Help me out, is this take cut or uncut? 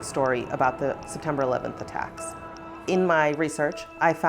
cut